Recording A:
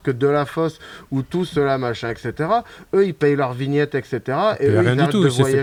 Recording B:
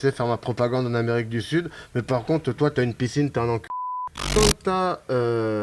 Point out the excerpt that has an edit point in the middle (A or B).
B